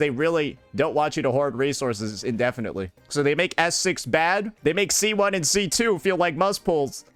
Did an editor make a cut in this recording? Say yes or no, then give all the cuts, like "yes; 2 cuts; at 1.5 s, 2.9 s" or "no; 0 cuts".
no; 0 cuts